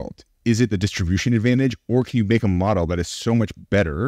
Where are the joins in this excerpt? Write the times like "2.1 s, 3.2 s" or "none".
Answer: none